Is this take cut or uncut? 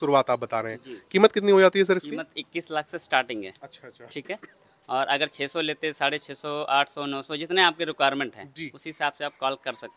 uncut